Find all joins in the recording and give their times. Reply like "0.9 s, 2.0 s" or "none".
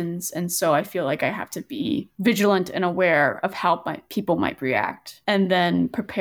none